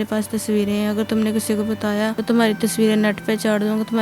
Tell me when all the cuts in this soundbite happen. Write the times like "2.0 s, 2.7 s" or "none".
2.2 s